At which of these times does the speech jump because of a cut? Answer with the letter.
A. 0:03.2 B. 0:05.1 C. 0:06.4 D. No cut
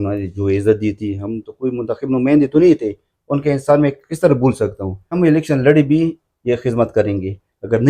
B